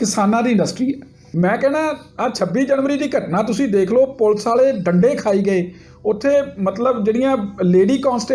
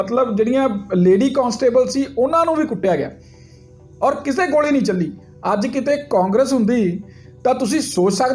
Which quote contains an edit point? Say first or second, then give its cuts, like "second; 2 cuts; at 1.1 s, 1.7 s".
first; 1 cut; at 1.2 s